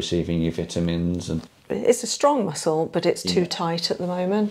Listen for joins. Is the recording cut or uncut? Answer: cut